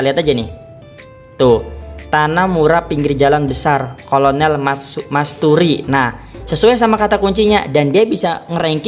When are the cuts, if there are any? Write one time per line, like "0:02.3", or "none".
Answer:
none